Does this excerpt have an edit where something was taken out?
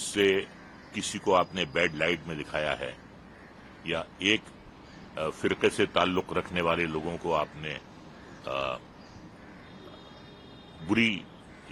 no; 0 cuts

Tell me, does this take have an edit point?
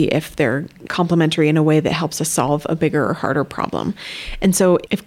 no; 0 cuts

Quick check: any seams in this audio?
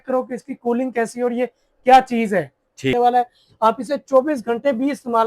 yes; 1 cut; at 2.9 s

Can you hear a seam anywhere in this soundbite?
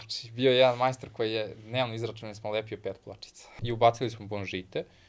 yes; 1 cut; at 3.6 s

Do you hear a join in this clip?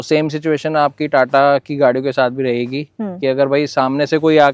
no; 0 cuts

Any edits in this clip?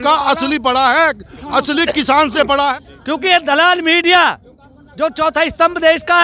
yes; 1 cut; at 2.5 s

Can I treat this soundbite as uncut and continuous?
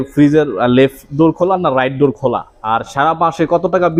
yes; 0 cuts

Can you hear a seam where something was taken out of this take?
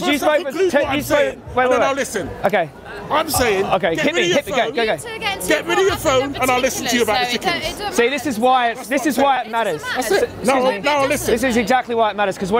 no; 0 cuts

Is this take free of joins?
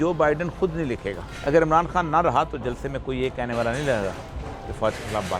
no; 1 cut; at 1.2 s

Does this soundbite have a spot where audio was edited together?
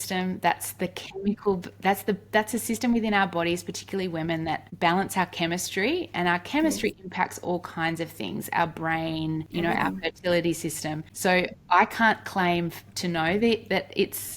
yes; 2 cuts; at 4.7 s, 9.5 s

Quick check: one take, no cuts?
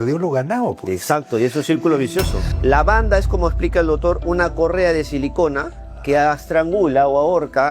no; 1 cut; at 2.4 s

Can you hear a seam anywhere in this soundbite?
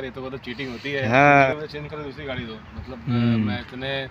yes; 1 cut; at 1.5 s

